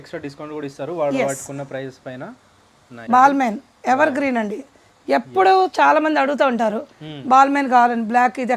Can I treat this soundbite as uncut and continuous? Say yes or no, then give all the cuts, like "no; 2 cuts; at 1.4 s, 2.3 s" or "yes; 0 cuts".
no; 1 cut; at 3.0 s